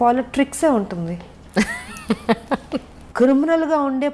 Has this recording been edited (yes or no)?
yes